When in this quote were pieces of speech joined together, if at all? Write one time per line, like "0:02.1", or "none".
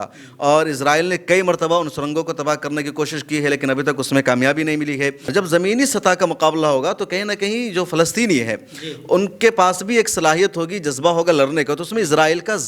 0:05.2